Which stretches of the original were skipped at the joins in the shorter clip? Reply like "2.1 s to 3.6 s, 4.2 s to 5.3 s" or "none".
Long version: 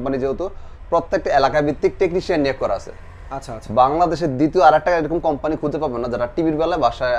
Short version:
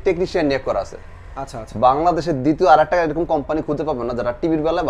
none